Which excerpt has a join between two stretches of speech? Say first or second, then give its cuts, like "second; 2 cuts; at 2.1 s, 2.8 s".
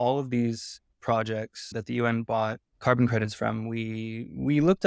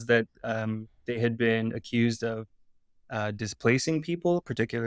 first; 2 cuts; at 1.7 s, 2.7 s